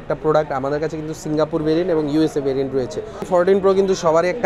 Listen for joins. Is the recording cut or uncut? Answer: cut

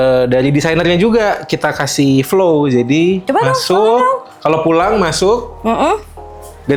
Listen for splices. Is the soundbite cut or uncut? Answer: uncut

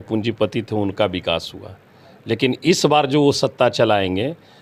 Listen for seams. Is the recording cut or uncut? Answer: uncut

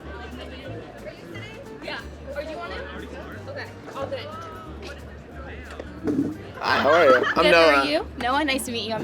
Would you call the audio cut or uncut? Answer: cut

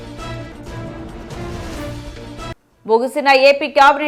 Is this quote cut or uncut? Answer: uncut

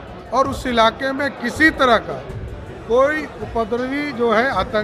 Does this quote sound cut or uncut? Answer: uncut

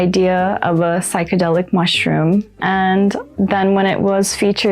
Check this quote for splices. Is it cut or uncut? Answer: cut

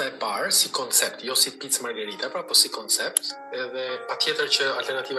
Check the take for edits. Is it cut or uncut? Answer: uncut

